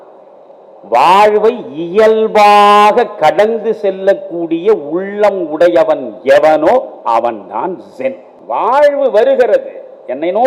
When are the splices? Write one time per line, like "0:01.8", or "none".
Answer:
0:08.3